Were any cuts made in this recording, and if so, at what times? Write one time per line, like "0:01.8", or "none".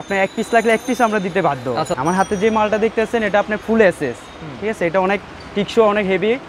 0:01.9